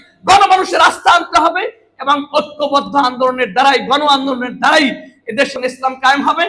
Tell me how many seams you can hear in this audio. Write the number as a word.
one